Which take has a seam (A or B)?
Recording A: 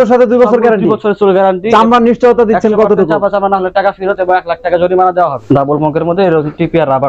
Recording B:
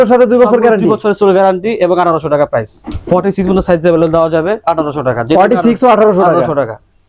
A